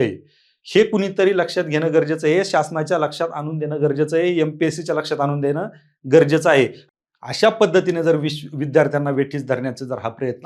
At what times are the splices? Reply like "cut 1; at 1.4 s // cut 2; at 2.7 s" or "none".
cut 1; at 6.8 s